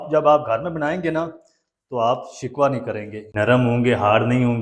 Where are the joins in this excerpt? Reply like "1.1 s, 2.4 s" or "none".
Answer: 3.2 s